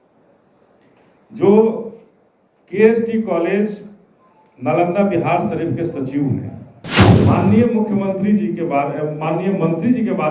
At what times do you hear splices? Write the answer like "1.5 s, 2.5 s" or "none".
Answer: 7.1 s